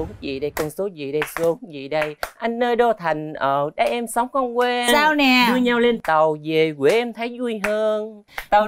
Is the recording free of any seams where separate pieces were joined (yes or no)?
yes